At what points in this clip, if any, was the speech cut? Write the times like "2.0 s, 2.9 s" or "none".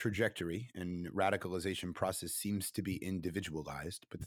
none